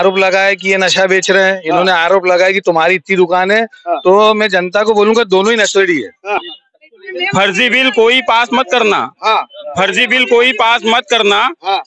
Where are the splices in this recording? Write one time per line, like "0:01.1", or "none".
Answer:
0:06.4